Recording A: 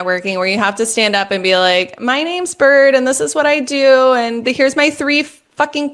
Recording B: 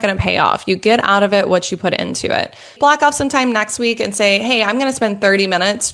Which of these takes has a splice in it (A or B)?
B